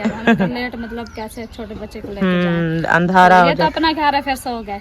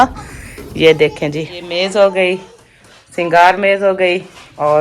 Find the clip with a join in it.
second; 1 cut; at 1.6 s

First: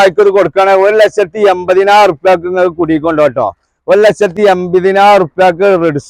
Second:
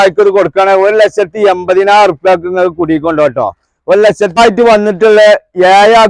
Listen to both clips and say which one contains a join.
second; 1 cut; at 4.4 s

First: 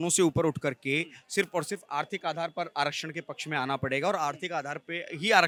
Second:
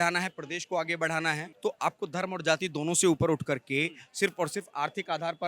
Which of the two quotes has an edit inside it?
second; 1 cut; at 1.5 s

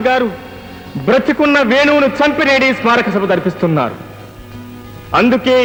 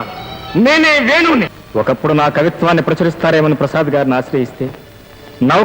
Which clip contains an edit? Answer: second; 1 cut; at 1.6 s

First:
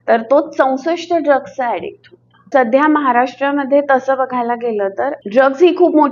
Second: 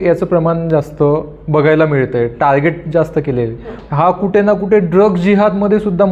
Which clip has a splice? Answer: first; 2 cuts; at 2.5 s, 5.2 s

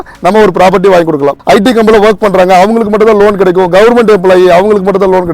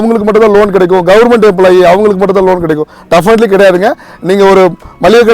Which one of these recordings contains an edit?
first; 1 cut; at 1.3 s

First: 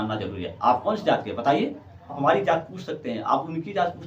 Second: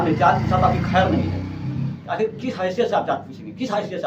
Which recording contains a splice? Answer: first; 1 cut; at 2.2 s

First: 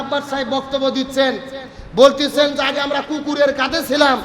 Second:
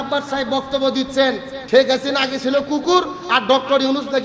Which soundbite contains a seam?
second; 1 cut; at 1.5 s

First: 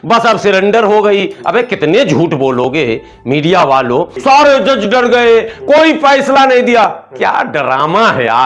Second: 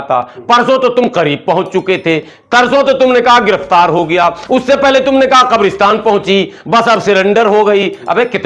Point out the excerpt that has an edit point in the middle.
first; 1 cut; at 4.1 s

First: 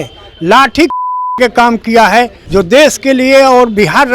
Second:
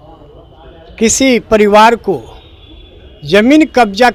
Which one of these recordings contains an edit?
first; 1 cut; at 2.4 s

